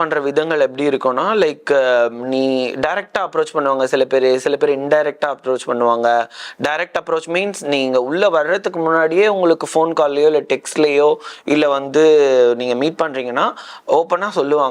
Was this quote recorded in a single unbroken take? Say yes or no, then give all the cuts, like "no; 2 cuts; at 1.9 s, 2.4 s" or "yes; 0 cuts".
yes; 0 cuts